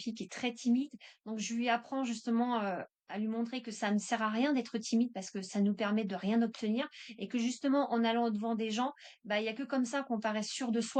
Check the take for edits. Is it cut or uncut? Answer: uncut